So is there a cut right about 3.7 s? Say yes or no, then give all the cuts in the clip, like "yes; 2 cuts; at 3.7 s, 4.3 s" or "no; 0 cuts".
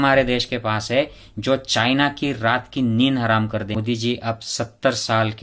yes; 1 cut; at 3.7 s